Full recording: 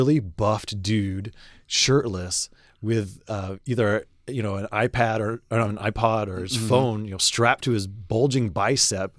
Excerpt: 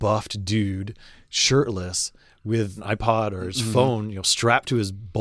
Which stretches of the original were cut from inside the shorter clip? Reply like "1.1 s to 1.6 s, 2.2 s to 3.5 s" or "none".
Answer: 3.2 s to 5.8 s